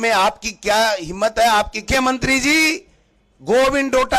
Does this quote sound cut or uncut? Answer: cut